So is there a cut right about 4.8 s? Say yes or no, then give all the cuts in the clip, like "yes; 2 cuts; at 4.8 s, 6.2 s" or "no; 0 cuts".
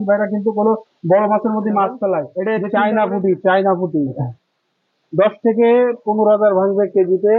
no; 1 cut; at 2.3 s